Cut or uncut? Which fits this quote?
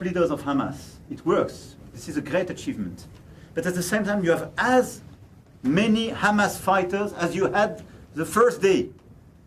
uncut